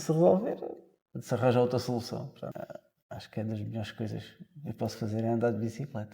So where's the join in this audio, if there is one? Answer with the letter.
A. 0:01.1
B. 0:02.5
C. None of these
B